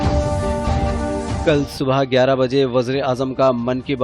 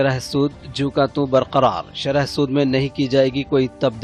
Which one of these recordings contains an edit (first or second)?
first